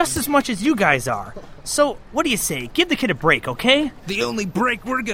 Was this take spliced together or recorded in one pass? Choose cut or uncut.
cut